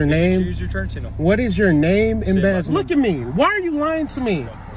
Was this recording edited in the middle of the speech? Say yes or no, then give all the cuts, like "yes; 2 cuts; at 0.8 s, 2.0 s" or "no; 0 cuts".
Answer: no; 0 cuts